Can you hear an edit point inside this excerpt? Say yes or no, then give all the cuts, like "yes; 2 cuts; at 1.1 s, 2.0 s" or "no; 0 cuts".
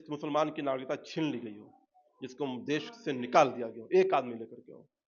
no; 0 cuts